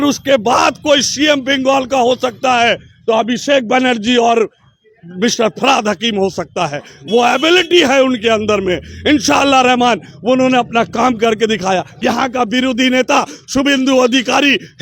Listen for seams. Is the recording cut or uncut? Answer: cut